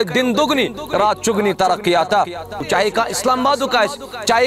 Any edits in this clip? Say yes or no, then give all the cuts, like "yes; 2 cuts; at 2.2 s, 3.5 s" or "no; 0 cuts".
yes; 1 cut; at 2.6 s